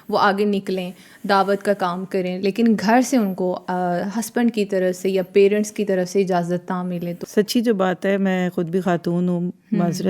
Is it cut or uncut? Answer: cut